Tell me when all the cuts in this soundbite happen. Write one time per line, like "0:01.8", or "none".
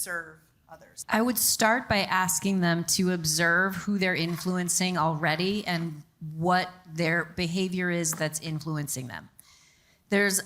0:00.9